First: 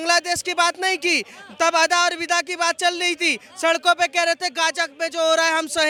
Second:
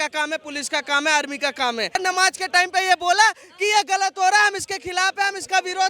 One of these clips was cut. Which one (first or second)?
second